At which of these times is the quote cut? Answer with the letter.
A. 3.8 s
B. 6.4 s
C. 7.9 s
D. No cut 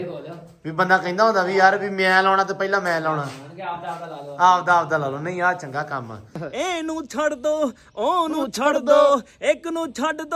B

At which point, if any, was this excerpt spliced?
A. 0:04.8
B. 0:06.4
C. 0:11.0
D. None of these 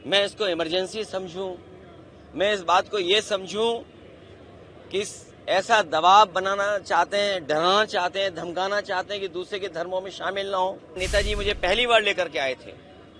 C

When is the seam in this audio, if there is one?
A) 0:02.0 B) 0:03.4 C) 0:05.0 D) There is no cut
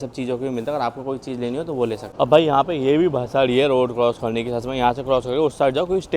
A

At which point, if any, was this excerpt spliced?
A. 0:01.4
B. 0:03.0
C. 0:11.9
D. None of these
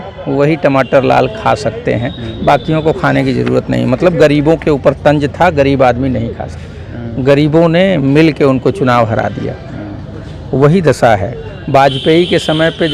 D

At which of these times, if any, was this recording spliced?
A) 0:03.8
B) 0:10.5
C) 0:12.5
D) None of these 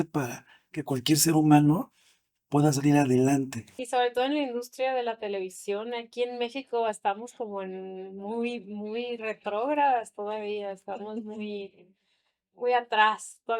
A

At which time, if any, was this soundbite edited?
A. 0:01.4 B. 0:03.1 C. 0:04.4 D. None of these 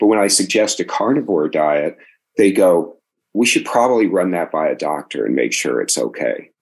B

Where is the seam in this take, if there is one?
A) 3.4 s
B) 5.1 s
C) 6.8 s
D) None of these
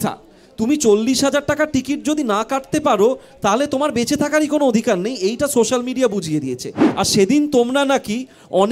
C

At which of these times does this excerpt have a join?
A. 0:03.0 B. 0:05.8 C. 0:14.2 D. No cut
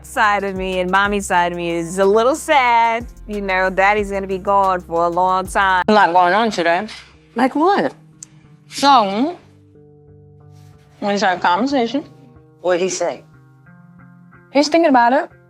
B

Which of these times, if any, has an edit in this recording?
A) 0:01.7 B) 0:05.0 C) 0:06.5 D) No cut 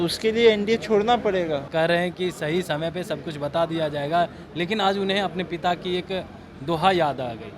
A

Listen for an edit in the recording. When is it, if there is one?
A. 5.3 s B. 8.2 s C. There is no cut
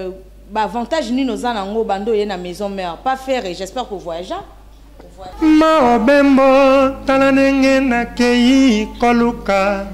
A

